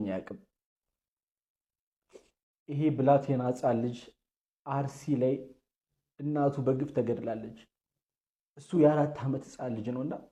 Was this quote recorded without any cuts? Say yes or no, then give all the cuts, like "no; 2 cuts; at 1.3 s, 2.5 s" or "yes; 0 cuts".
yes; 0 cuts